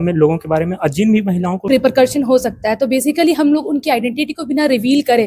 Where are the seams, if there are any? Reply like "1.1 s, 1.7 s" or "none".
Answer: 1.6 s

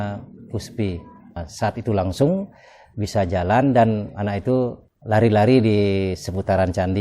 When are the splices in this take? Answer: 1.4 s, 4.9 s

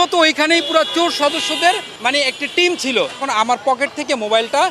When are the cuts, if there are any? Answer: 1.9 s, 3.3 s

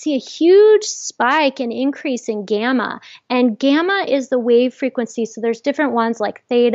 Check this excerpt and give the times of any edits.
none

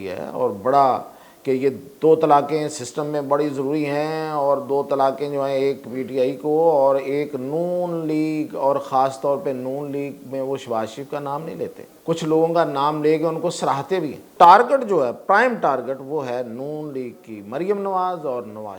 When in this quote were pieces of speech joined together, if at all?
11.9 s, 14.3 s

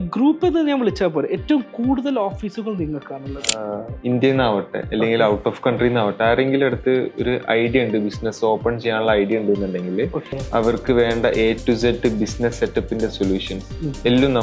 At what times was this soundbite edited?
3.6 s, 10.2 s

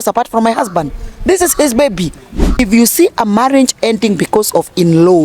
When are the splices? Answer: 2.4 s

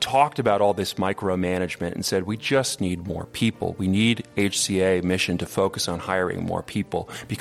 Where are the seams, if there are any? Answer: none

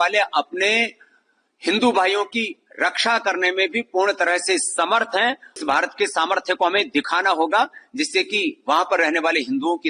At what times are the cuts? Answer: 5.6 s

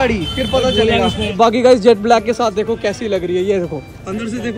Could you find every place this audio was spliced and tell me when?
1.2 s

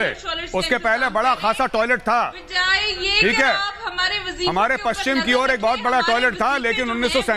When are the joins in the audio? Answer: none

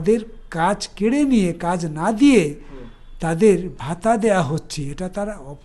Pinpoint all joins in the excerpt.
none

